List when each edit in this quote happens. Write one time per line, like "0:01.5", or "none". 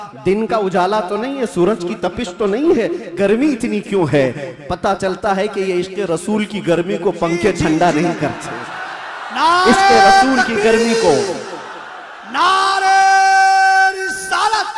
none